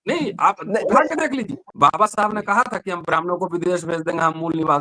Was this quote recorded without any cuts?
no; 1 cut; at 1.6 s

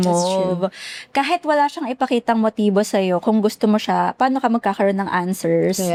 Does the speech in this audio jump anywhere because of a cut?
no; 0 cuts

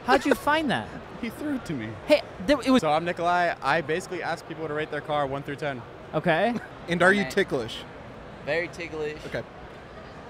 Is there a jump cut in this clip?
yes; 3 cuts; at 1.5 s, 2.8 s, 6.7 s

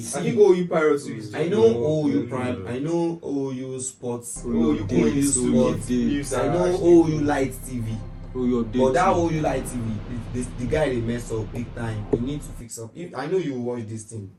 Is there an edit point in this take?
no; 0 cuts

